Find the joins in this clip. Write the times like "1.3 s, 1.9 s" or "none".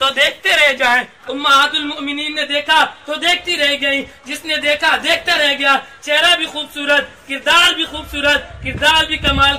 1.2 s